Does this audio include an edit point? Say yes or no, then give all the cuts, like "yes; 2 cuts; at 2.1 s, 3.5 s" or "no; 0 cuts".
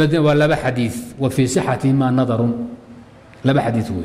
no; 0 cuts